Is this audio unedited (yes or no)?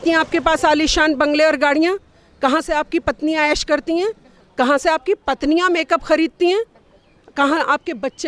yes